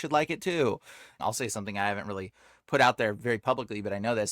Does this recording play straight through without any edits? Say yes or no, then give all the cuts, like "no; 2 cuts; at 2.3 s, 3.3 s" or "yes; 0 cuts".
no; 1 cut; at 1.1 s